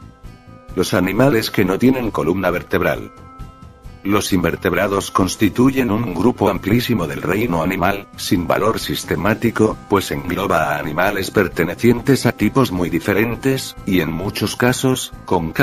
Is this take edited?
no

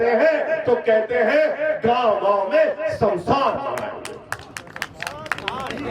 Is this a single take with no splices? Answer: yes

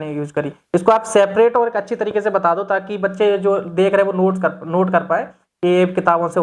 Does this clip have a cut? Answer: no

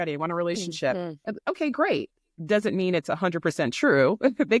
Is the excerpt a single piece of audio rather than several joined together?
yes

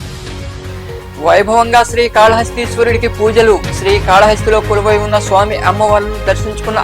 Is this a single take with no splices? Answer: no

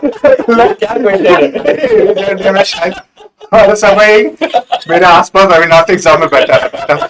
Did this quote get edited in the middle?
no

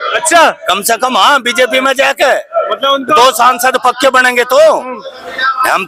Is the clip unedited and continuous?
yes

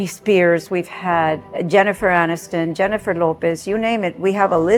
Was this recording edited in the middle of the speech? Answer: no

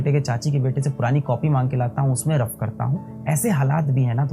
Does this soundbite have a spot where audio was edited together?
no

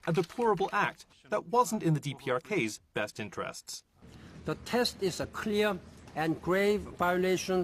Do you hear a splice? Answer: no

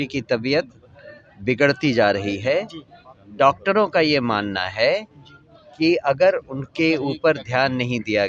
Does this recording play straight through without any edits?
yes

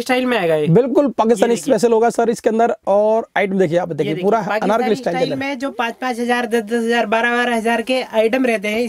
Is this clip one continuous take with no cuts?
yes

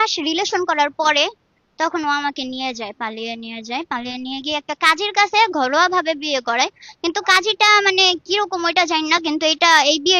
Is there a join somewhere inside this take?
no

